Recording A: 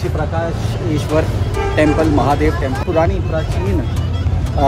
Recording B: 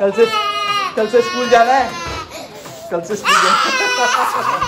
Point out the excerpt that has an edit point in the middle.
A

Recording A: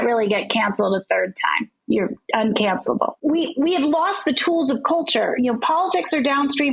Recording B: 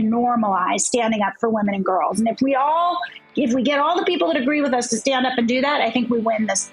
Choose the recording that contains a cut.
A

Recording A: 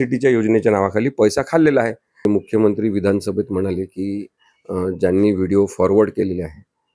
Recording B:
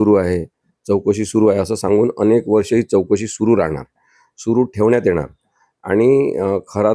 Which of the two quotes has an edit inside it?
A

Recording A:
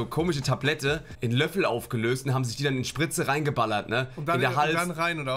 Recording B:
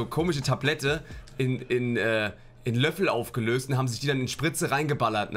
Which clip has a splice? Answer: A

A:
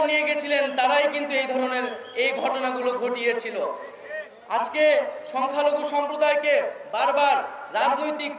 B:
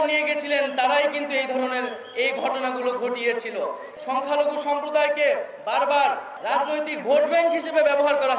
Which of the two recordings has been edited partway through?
B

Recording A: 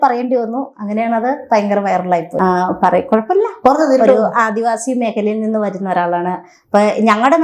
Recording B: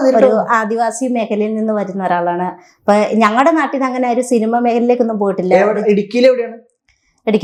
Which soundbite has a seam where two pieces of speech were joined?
A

